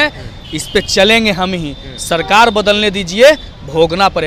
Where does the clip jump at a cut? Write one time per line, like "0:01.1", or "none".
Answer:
none

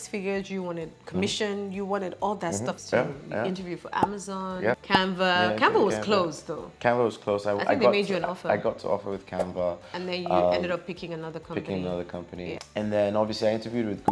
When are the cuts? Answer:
none

